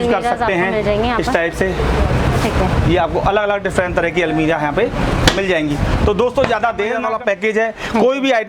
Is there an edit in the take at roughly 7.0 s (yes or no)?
yes